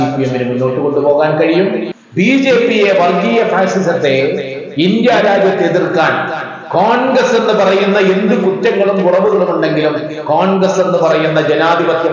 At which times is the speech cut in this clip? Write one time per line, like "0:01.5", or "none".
0:01.9

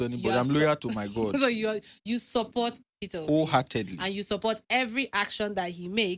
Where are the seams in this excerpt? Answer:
none

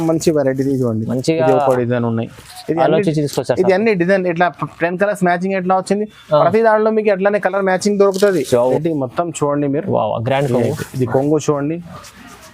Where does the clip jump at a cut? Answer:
0:08.8

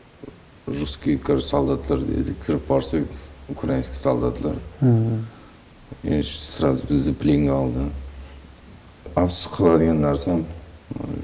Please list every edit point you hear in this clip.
0:09.1

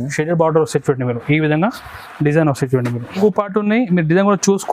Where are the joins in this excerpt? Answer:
0:03.2

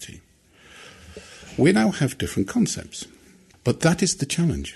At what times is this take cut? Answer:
0:03.5

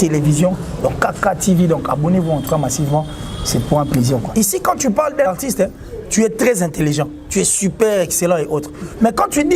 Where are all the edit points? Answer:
0:04.3
0:05.3

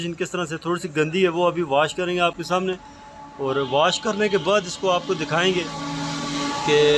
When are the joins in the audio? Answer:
none

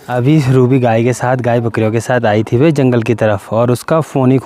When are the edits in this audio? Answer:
none

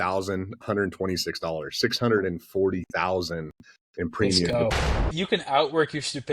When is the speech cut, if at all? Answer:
0:05.1

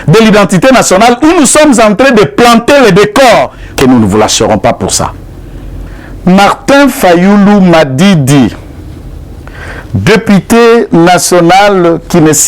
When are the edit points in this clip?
0:03.6

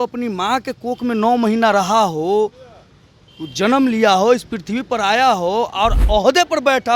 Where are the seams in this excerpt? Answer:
0:06.0

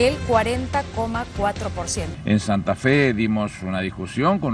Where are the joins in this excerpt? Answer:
0:02.0

